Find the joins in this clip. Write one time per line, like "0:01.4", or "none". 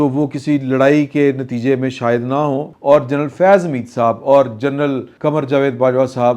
0:02.7
0:05.1